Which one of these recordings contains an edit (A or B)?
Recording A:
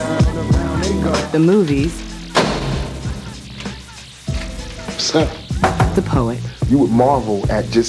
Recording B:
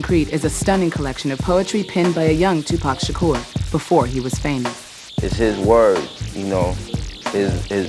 B